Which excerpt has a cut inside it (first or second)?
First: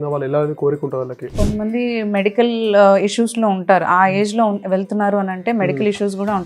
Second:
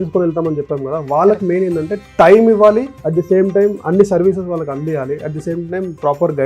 first